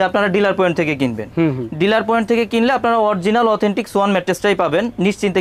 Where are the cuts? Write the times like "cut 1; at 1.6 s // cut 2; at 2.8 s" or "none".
none